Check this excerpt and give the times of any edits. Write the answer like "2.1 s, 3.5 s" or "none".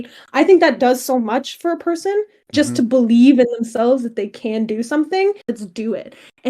5.6 s